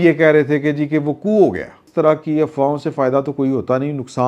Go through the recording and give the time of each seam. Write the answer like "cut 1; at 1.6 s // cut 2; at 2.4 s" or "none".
cut 1; at 1.8 s